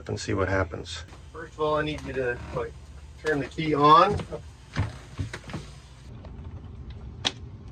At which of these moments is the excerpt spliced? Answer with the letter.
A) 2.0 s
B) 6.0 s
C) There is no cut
B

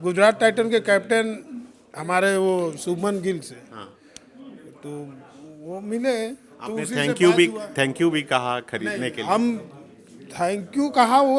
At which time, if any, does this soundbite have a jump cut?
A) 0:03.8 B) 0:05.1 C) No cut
C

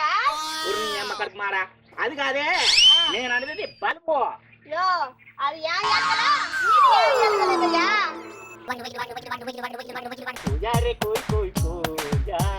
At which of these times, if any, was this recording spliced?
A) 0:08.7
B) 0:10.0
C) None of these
A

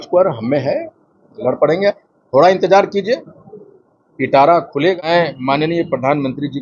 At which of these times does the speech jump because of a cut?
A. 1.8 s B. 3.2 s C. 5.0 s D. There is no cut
C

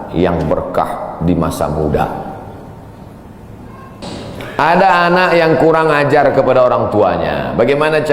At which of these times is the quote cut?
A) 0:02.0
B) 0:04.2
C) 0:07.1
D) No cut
B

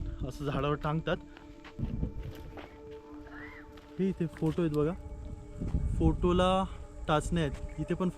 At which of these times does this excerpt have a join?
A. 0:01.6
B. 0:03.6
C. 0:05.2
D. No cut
A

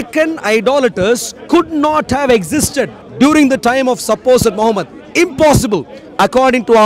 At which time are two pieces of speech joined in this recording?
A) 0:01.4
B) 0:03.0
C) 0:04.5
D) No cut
B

